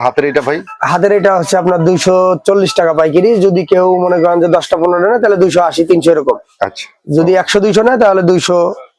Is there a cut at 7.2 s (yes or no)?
no